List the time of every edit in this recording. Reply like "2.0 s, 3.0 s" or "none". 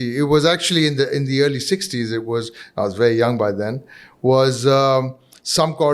none